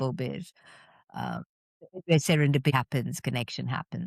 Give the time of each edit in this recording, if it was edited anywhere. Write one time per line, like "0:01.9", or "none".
0:02.7